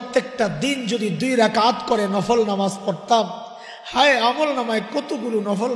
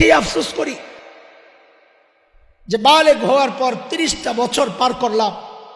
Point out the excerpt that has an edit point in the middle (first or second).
second